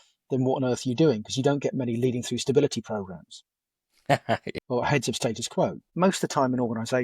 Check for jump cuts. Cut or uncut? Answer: cut